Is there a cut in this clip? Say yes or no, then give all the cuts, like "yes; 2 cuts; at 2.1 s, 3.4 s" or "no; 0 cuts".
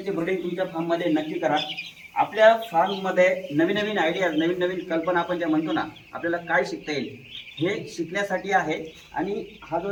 no; 0 cuts